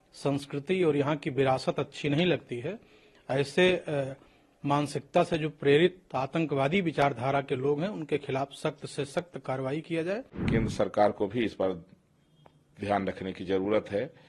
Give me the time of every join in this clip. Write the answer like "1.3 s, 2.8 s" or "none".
10.3 s

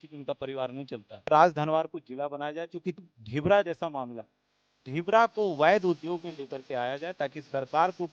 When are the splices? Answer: 1.3 s, 3.1 s

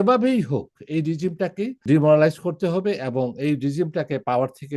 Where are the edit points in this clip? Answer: 1.8 s

